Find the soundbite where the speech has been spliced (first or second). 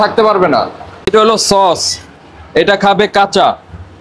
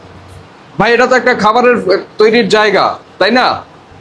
first